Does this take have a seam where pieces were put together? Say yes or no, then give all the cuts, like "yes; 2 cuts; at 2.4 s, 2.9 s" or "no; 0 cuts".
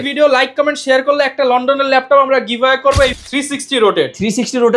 yes; 1 cut; at 3.2 s